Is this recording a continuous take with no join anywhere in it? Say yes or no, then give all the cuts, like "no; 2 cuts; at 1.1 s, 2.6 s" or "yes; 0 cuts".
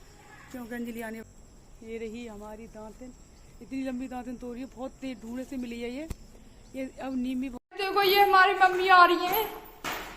no; 2 cuts; at 1.2 s, 7.6 s